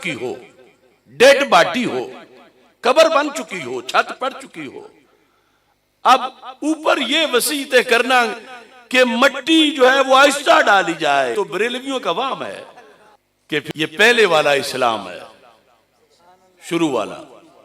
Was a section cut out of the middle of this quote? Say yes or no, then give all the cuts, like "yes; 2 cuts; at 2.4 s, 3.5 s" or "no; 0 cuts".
yes; 2 cuts; at 11.3 s, 13.7 s